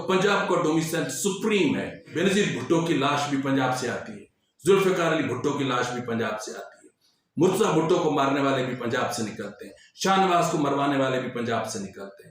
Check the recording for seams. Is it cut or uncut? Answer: cut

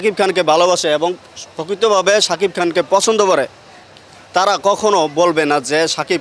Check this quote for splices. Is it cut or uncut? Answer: uncut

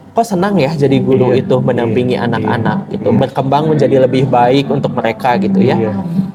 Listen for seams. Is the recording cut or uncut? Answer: uncut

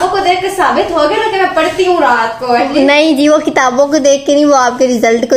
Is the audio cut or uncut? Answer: uncut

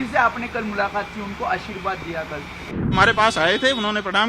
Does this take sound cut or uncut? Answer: cut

